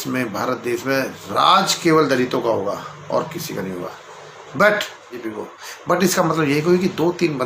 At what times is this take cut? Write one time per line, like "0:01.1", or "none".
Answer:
0:05.2